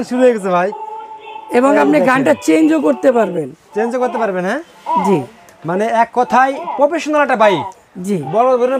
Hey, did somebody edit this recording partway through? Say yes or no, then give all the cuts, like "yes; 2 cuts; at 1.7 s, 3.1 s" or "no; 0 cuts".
no; 0 cuts